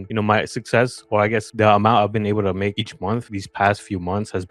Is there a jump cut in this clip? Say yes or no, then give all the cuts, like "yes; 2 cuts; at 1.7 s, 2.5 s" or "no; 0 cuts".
no; 0 cuts